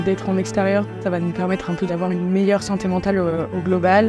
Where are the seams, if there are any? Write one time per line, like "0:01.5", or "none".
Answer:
0:00.9